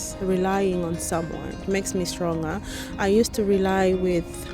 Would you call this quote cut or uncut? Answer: cut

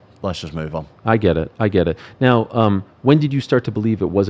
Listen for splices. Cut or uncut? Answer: uncut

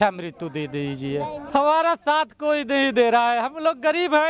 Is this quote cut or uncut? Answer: cut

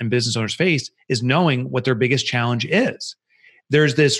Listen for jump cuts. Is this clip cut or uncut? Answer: uncut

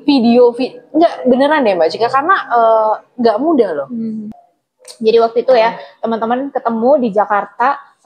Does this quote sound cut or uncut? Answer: cut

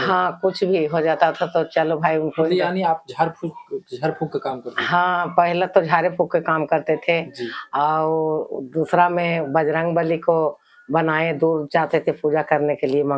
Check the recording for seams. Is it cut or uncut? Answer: uncut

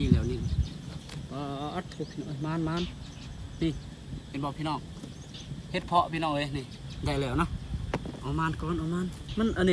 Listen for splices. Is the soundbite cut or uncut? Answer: uncut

